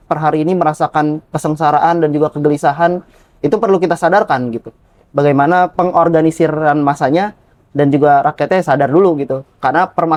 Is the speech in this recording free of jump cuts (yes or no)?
yes